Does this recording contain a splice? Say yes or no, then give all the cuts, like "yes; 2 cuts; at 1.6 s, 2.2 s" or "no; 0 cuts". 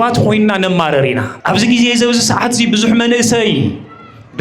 yes; 1 cut; at 1.3 s